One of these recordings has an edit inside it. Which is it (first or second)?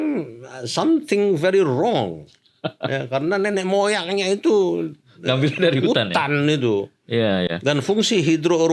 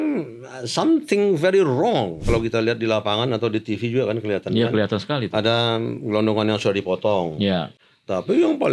second